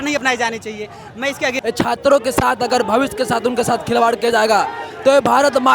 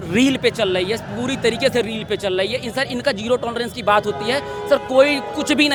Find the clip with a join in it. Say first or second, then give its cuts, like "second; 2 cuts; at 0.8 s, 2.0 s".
first; 1 cut; at 1.6 s